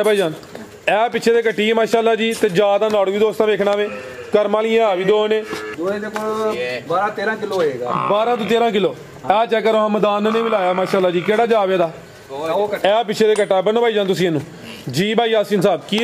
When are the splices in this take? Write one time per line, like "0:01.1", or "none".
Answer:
0:05.6